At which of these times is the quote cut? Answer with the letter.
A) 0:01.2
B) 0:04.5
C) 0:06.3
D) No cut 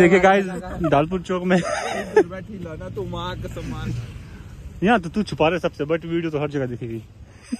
D